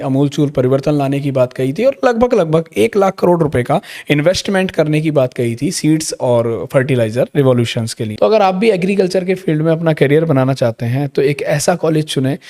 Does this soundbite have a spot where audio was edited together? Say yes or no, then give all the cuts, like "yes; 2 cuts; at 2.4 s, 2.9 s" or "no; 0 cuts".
yes; 1 cut; at 8.0 s